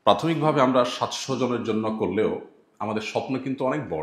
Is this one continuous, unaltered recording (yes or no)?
yes